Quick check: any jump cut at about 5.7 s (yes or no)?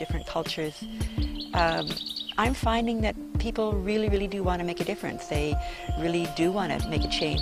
yes